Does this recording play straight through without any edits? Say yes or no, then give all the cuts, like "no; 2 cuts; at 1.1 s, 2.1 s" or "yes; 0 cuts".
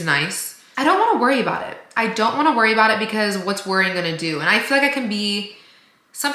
yes; 0 cuts